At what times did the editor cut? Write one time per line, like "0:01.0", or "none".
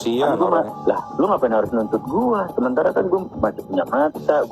0:00.9